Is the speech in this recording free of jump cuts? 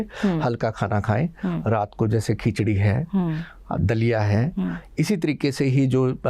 yes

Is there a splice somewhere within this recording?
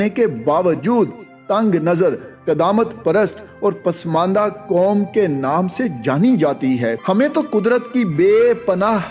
yes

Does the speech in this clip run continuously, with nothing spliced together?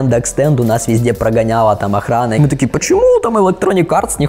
no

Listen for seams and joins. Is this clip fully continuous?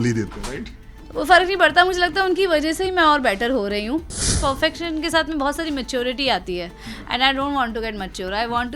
no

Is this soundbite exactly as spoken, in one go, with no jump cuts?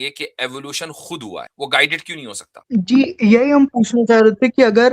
no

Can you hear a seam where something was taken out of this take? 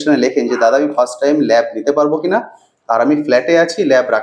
no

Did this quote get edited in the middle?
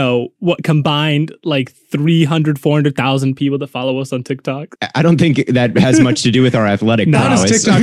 yes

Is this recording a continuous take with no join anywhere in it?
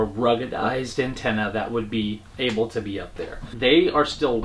yes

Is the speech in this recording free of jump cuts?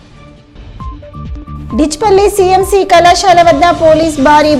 no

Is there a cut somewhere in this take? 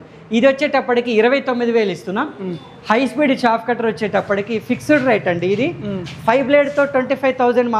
no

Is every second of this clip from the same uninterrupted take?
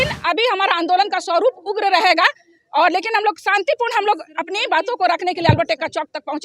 yes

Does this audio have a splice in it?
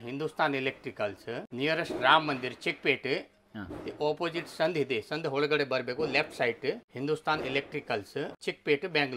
yes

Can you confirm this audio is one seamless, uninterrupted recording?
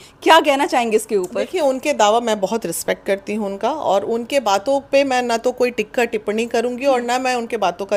yes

